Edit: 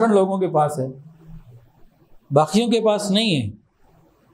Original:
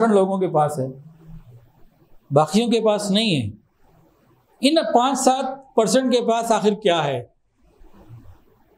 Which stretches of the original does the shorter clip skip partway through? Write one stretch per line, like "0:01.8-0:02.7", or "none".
none